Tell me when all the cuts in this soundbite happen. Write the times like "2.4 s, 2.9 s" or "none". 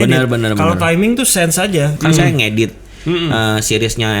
1.9 s